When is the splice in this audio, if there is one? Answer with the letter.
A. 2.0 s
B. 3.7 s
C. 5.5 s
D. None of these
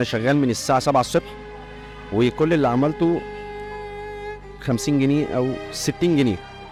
D